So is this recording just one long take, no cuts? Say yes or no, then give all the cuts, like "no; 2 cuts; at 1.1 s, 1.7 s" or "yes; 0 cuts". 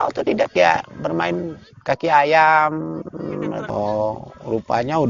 no; 1 cut; at 3.7 s